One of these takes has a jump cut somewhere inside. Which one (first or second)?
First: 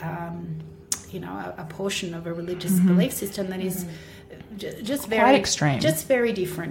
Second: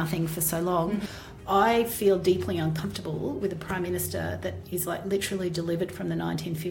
second